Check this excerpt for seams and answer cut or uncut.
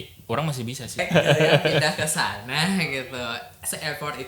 cut